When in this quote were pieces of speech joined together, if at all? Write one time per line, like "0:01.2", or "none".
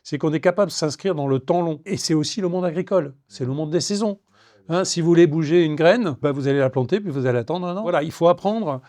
0:01.9
0:06.1
0:07.9